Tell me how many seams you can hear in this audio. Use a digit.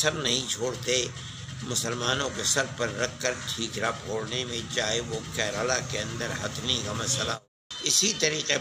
1